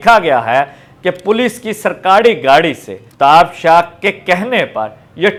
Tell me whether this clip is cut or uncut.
uncut